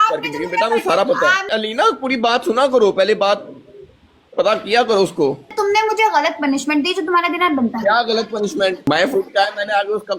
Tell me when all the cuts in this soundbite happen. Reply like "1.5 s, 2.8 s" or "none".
1.4 s, 5.5 s, 8.8 s